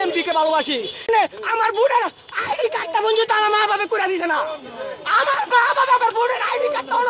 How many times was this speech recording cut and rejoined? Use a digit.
1